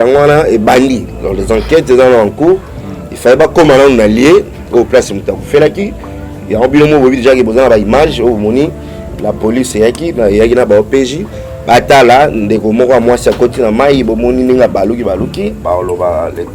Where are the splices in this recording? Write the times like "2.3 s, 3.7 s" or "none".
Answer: 15.6 s